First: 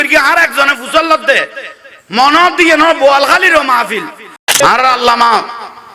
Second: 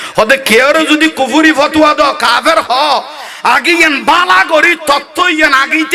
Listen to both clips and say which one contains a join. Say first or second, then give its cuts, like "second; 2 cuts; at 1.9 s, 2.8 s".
first; 1 cut; at 4.6 s